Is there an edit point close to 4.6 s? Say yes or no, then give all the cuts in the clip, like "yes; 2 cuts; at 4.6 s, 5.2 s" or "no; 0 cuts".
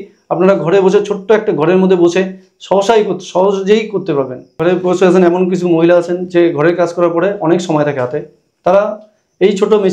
yes; 1 cut; at 4.6 s